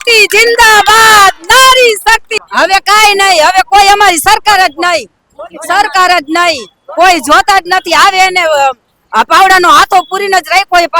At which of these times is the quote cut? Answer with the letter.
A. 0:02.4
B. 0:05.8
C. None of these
A